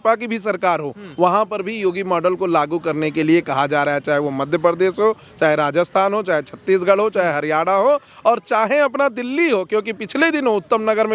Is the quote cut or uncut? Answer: uncut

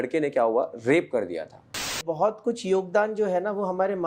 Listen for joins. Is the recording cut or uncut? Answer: cut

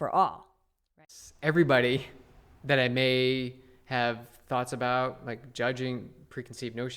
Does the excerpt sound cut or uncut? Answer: cut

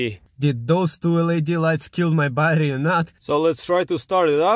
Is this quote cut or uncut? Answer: cut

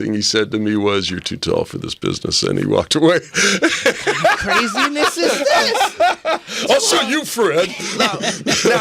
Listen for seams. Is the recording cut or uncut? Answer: uncut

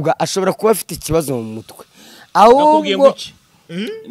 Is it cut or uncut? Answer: uncut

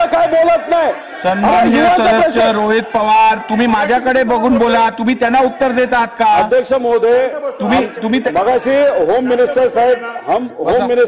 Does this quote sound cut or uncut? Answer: uncut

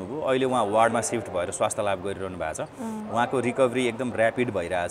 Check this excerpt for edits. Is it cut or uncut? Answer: uncut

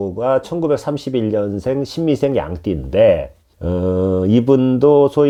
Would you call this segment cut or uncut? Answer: uncut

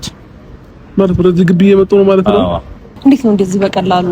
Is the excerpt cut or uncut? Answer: cut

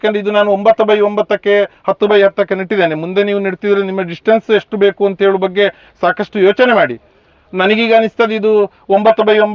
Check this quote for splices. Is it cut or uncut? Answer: uncut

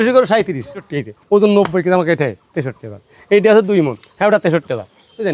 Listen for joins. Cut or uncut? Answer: cut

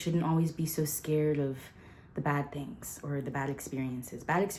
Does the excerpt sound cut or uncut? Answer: uncut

